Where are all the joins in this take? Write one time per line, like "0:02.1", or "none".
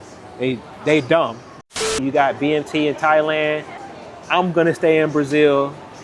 0:02.0
0:03.7